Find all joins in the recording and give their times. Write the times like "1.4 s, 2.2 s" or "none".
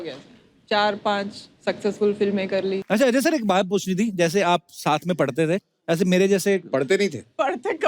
2.8 s